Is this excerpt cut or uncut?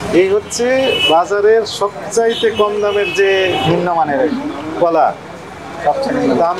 uncut